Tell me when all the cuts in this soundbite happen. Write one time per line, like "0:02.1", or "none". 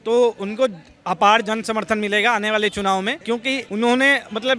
0:03.4

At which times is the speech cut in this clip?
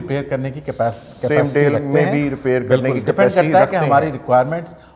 none

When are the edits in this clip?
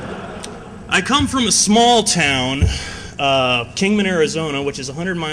none

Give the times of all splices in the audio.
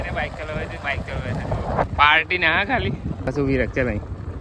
0:01.8
0:03.3

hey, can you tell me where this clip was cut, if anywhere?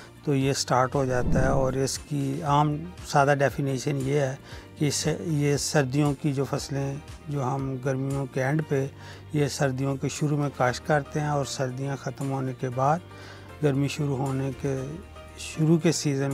none

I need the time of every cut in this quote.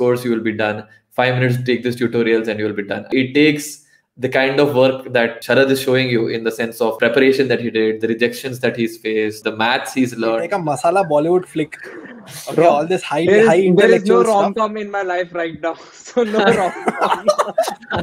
0:03.1
0:05.4
0:10.4

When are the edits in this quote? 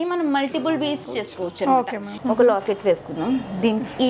0:01.0
0:02.1

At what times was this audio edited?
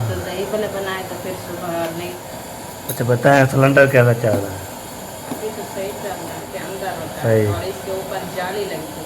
0:02.2
0:06.5

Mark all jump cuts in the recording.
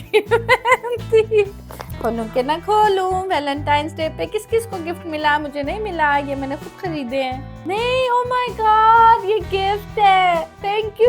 0:01.6
0:07.6

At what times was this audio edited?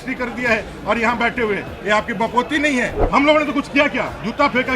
0:03.0

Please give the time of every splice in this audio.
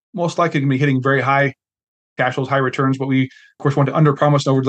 0:03.6

